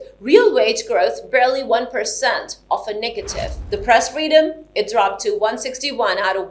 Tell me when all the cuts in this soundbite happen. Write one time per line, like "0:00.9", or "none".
0:03.6